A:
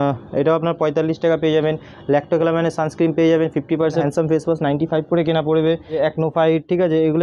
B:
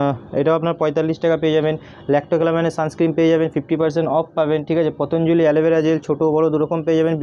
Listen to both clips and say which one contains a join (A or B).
A